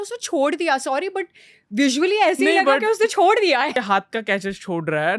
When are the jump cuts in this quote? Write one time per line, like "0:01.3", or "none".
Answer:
0:03.7